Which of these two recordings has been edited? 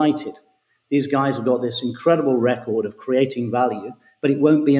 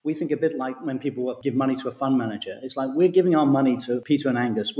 second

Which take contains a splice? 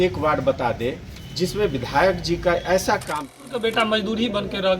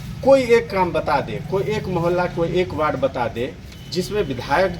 first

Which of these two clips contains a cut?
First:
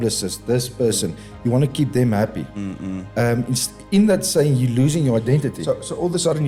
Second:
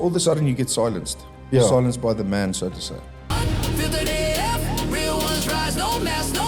second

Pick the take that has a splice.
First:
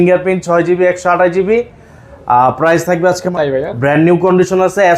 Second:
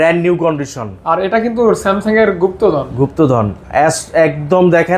first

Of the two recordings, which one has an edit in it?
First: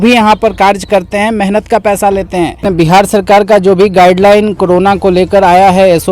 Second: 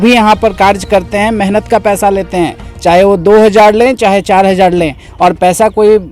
first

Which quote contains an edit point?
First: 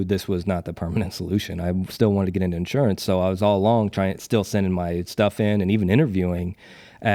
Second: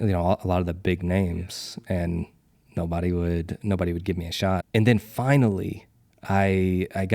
second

